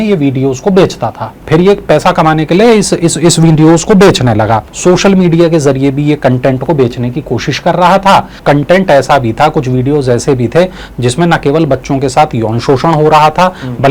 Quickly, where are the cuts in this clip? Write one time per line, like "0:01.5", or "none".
0:01.4
0:04.7
0:08.3